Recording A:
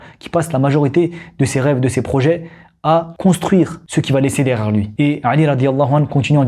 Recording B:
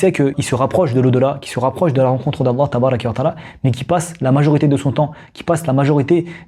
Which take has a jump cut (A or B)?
A